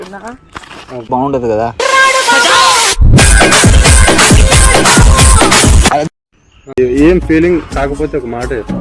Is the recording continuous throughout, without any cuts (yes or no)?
no